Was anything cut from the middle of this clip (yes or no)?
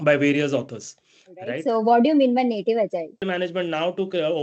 yes